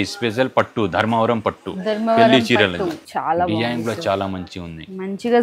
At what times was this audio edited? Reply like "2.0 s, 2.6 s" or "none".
3.0 s